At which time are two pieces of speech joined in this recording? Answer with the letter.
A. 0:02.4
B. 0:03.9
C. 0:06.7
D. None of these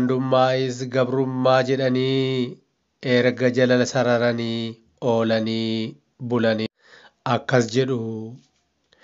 C